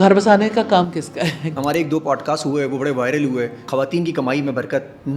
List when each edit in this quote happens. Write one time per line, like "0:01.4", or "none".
0:01.5
0:03.7